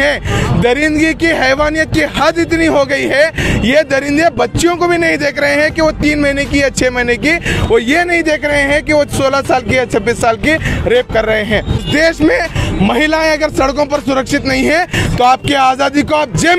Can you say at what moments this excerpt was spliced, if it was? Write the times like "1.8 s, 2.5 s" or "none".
11.9 s